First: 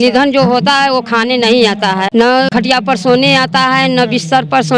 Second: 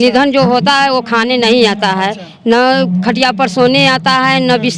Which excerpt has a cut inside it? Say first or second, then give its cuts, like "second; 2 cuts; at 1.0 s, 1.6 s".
first; 1 cut; at 2.4 s